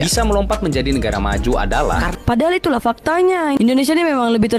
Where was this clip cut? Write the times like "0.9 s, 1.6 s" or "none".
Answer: 2.1 s